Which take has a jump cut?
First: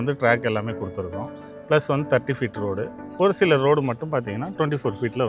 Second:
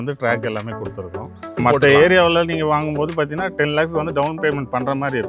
second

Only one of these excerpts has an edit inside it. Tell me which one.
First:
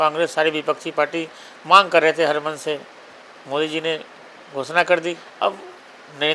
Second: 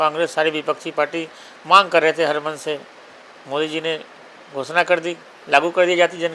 first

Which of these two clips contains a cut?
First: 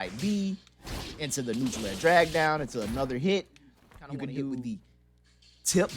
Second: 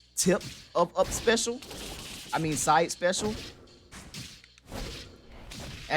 first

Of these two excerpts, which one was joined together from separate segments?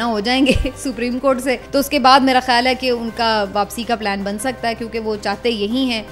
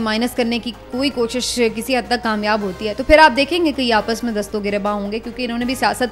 first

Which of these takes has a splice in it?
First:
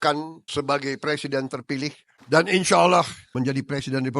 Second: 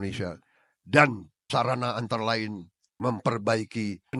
first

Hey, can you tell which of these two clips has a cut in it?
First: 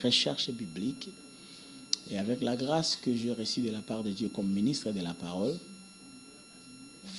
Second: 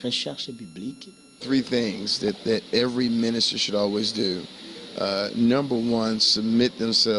second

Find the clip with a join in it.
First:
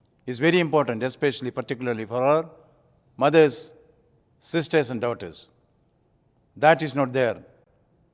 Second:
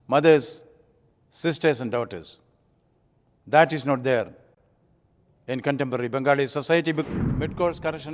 second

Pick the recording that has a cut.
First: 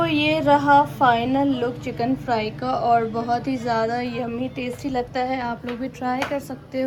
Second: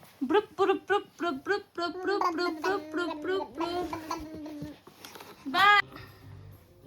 second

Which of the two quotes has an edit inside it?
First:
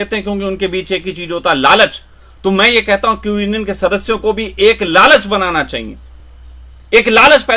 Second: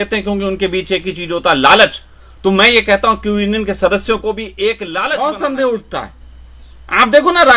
second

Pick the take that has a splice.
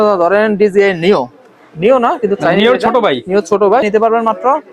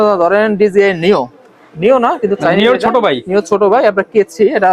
first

